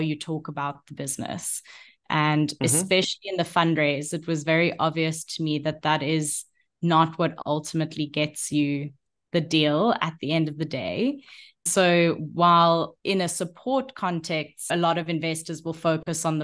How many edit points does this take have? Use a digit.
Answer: 3